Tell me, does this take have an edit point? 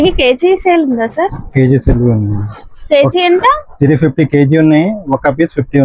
no; 0 cuts

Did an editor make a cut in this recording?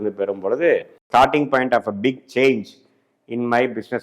yes; 1 cut; at 1.0 s

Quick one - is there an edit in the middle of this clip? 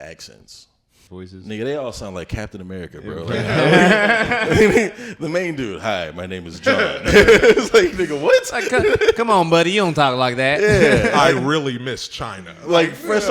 yes; 1 cut; at 1.0 s

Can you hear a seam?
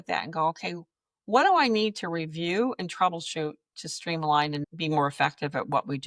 yes; 1 cut; at 4.6 s

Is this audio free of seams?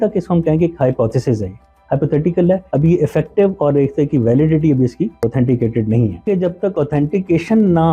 no; 3 cuts; at 2.6 s, 5.2 s, 6.2 s

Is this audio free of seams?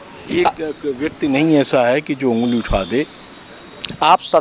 yes; 0 cuts

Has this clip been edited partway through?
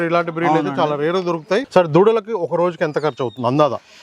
yes; 1 cut; at 1.7 s

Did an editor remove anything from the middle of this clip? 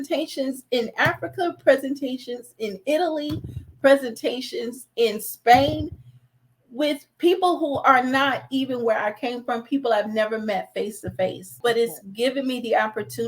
yes; 1 cut; at 11.5 s

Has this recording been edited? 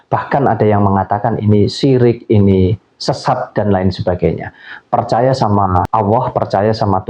yes; 1 cut; at 5.9 s

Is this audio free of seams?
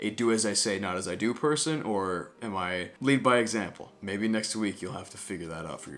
yes; 0 cuts

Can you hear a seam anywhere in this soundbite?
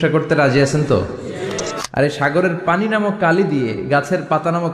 yes; 1 cut; at 1.7 s

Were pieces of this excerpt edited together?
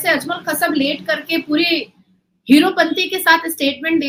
no; 0 cuts

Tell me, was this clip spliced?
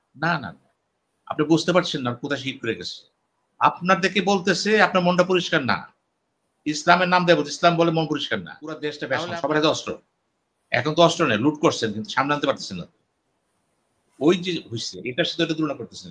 yes; 1 cut; at 8.9 s

